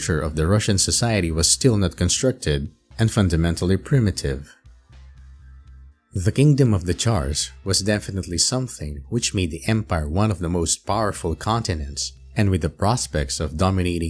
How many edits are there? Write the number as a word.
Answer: one